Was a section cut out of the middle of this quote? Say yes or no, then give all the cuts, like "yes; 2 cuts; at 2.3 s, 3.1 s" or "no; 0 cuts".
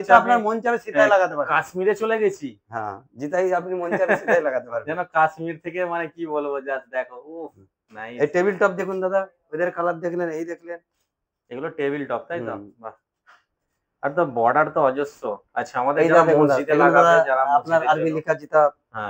no; 0 cuts